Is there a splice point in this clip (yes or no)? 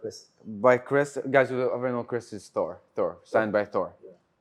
no